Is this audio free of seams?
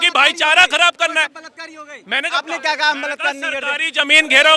yes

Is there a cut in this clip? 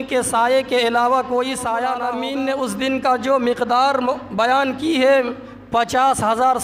yes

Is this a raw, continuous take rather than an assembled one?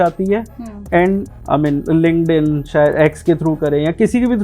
no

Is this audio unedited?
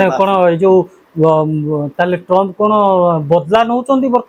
yes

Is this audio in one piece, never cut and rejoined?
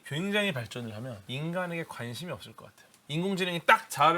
no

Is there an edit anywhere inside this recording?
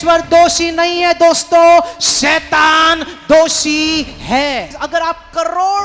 yes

